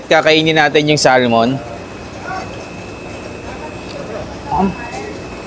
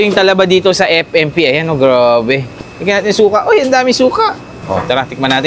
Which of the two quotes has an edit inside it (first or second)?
second